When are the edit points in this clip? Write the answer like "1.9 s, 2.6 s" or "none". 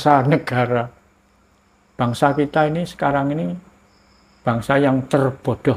none